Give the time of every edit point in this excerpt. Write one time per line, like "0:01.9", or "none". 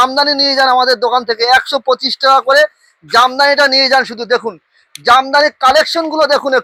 none